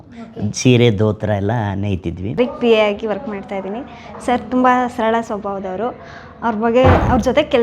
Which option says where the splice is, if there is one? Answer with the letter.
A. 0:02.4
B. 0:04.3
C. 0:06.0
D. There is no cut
A